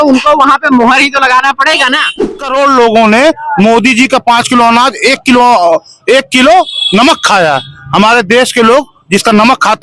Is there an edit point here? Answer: yes; 1 cut; at 2.4 s

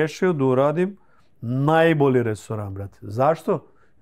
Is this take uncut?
yes; 0 cuts

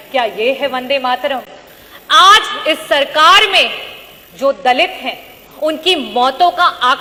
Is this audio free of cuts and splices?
yes; 0 cuts

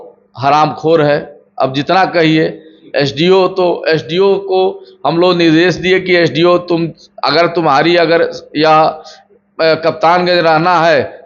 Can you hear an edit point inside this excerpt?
no; 0 cuts

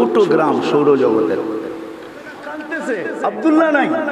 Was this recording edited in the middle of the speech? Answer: yes; 1 cut; at 2.7 s

